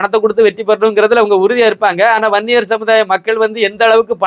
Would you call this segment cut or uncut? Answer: uncut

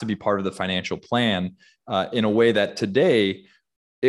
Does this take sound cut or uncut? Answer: uncut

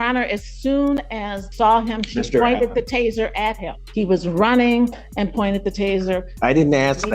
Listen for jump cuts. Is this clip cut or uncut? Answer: cut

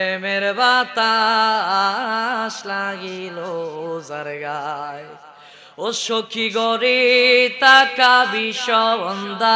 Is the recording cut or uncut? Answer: uncut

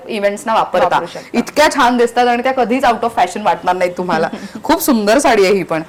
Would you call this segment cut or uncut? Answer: uncut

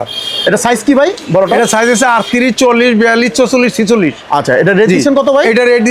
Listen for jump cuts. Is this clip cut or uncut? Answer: uncut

